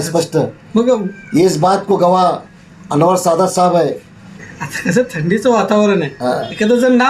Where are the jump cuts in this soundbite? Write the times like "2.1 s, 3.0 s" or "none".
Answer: 4.4 s